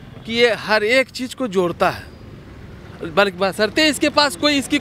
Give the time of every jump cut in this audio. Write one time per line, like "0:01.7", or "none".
none